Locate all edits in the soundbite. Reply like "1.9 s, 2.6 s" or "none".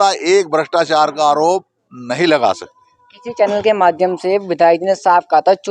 none